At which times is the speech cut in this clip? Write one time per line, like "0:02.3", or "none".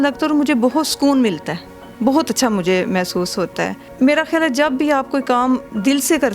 none